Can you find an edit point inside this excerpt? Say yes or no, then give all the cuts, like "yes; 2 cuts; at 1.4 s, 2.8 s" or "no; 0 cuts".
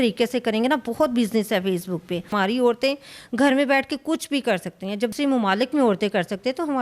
yes; 2 cuts; at 2.3 s, 5.1 s